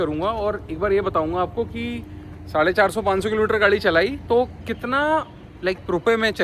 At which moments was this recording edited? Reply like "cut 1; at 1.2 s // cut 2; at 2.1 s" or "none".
none